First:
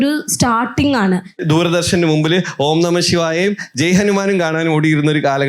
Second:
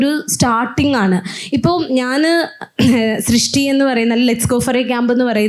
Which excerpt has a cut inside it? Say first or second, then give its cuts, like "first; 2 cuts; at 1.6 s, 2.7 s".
first; 1 cut; at 1.4 s